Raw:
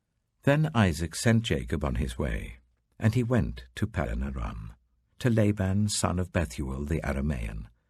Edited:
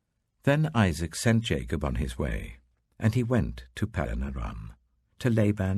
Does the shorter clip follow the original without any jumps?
yes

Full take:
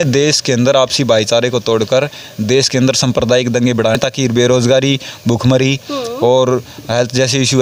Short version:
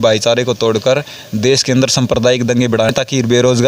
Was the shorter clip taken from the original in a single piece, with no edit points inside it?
yes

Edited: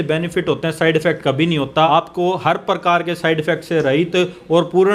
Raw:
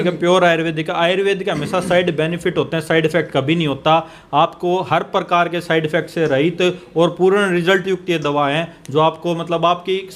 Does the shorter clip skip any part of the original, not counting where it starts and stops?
yes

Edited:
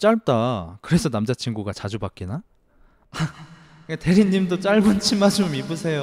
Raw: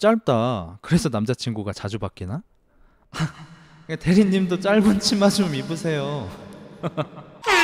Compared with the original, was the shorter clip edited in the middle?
no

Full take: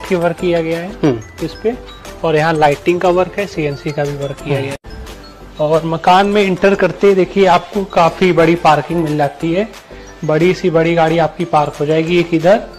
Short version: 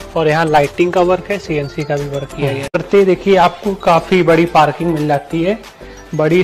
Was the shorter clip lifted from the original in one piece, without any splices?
no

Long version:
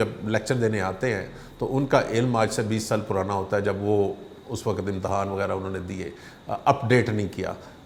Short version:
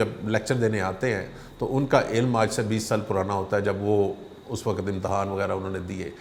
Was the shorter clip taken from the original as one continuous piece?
yes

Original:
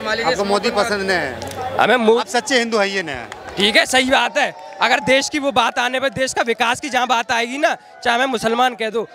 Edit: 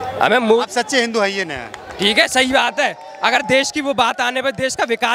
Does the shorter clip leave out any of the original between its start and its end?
no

